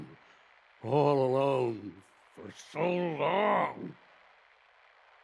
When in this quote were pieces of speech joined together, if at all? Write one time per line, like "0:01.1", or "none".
0:04.0